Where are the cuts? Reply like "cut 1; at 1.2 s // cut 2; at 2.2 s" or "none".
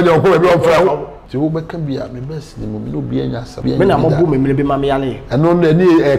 cut 1; at 1.2 s // cut 2; at 3.5 s